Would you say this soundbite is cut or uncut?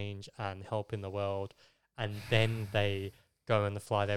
uncut